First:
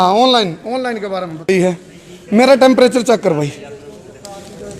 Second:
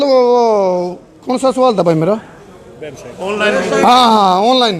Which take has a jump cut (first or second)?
first